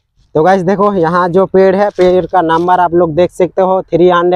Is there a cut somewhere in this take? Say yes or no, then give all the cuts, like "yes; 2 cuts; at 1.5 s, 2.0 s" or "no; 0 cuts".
no; 0 cuts